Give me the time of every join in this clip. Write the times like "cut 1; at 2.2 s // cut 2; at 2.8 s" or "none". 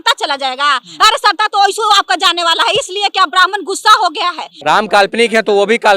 cut 1; at 4.5 s

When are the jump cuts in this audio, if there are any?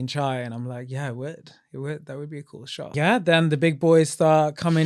cut 1; at 2.9 s

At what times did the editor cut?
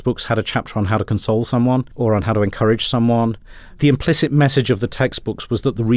cut 1; at 1.9 s // cut 2; at 3.7 s

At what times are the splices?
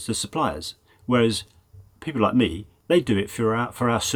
none

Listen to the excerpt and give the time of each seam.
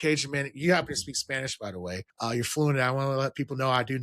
cut 1; at 2.1 s

